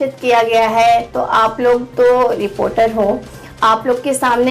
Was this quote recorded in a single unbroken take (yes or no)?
yes